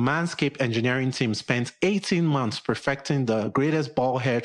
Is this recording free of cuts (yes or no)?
yes